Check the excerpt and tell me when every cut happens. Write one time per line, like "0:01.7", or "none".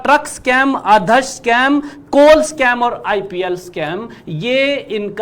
none